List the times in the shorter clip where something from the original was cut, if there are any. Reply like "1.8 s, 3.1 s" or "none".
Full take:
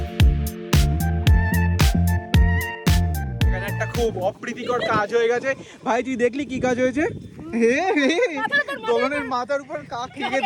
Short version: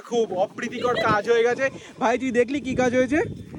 none